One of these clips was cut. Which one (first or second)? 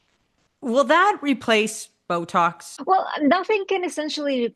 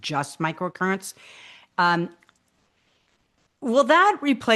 first